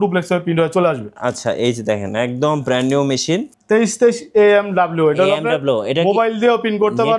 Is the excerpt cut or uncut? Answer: cut